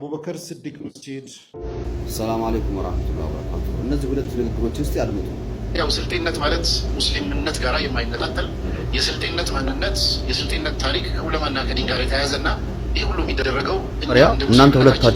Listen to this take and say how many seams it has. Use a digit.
1